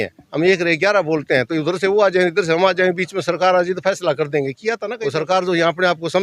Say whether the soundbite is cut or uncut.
cut